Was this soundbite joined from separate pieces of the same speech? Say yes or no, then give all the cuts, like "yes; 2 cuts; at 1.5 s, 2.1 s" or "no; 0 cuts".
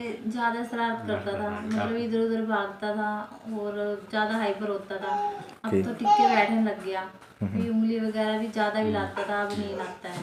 no; 0 cuts